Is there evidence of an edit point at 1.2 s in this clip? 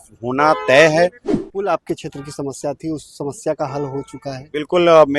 yes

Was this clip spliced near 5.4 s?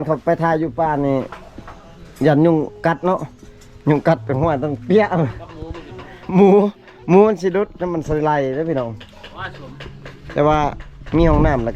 no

